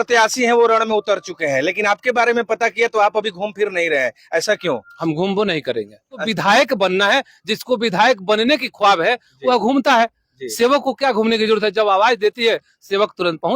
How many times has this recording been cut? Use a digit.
1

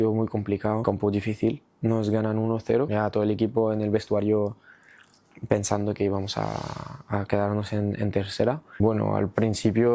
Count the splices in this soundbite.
3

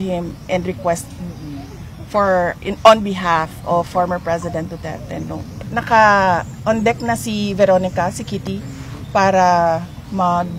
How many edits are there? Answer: 1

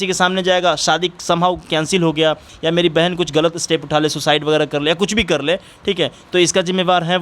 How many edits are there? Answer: 1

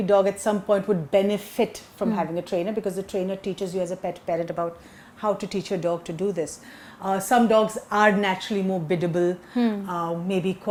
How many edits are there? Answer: 0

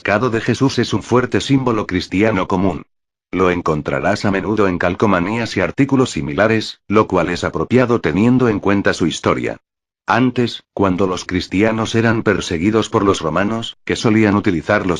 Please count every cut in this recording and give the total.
1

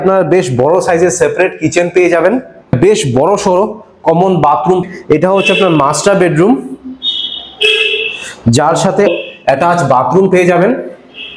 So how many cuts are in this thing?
3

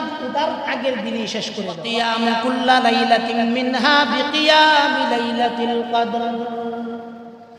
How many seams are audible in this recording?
1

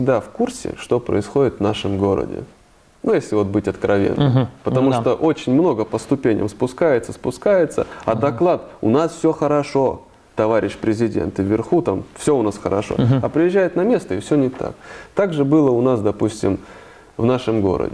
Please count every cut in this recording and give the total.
0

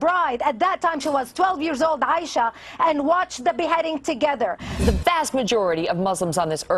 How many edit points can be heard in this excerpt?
1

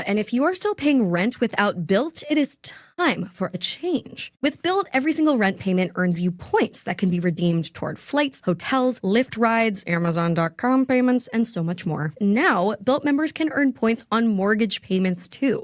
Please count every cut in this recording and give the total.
2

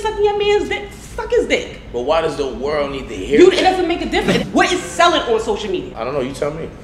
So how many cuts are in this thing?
2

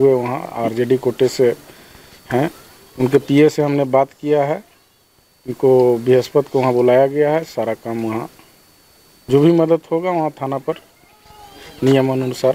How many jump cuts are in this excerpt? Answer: 0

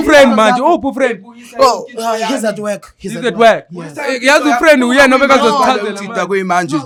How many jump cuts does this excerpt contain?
0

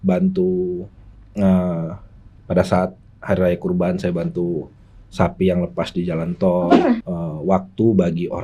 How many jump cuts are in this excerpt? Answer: 1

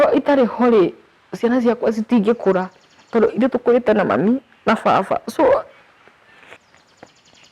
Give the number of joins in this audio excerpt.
1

